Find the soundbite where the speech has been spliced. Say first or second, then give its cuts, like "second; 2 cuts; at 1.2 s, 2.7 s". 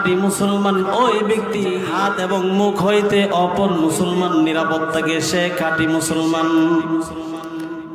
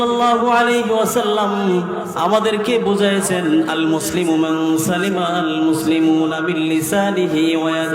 first; 1 cut; at 2.0 s